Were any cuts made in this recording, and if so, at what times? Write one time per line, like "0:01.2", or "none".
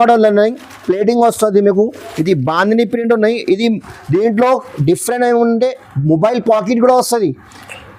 none